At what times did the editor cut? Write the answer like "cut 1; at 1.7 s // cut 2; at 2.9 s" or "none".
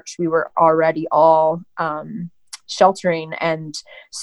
none